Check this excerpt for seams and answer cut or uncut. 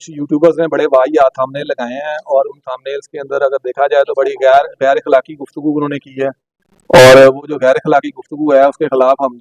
uncut